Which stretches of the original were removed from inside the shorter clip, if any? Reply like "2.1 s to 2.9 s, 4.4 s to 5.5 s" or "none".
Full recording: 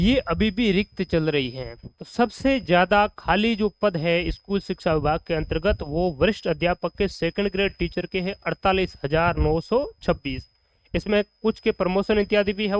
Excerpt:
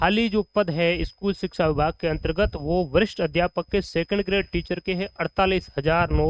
none